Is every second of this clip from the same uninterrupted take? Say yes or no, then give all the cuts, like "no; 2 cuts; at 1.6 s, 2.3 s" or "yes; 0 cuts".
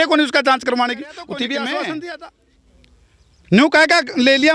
no; 1 cut; at 2.2 s